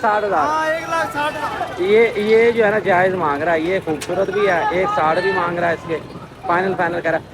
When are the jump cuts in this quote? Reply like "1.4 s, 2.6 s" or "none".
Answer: none